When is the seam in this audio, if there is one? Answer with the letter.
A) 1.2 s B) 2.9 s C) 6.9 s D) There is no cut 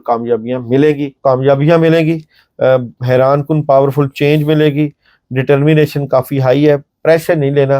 A